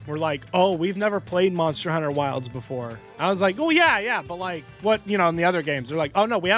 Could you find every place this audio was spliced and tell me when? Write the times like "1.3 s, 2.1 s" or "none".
none